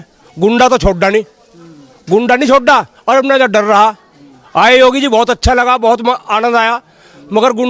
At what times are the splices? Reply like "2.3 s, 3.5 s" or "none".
none

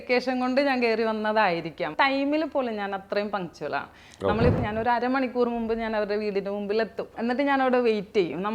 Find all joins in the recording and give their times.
1.9 s, 4.6 s, 7.1 s

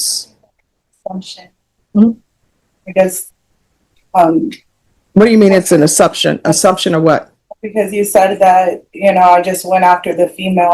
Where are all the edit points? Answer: 2.0 s

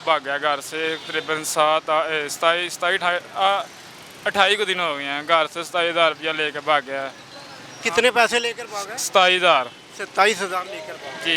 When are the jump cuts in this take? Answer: none

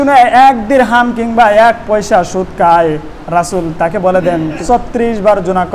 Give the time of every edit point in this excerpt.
4.6 s

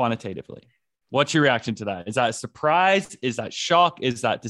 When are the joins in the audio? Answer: none

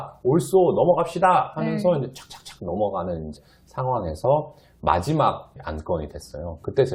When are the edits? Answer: 3.4 s, 5.5 s

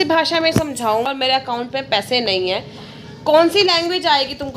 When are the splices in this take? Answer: 1.1 s

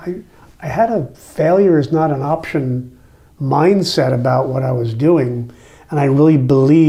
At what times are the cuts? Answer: none

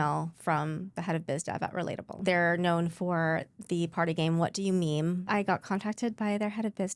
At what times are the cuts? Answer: 2.2 s, 5.2 s

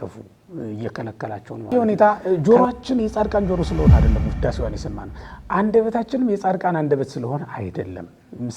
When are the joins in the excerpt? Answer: 1.7 s

